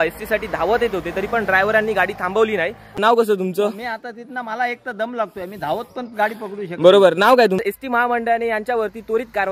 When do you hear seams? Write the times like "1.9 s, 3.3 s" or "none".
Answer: 3.1 s, 7.6 s

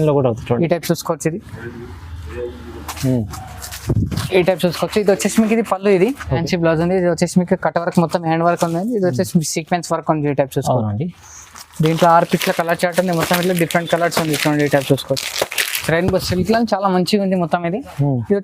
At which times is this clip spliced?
6.4 s, 15.7 s

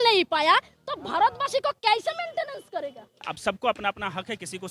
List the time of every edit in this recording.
3.3 s

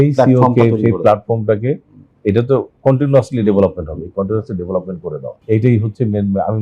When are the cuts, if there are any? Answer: none

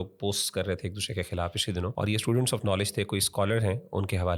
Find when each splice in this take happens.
1.9 s

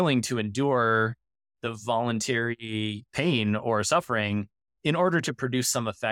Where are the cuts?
3.1 s

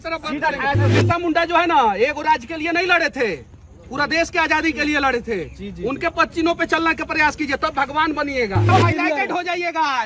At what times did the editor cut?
0.9 s, 8.7 s

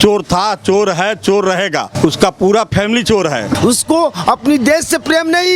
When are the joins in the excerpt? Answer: 1.9 s, 3.5 s

